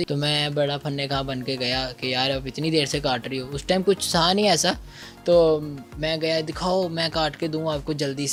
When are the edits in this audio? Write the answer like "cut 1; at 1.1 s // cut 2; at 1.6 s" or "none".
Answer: none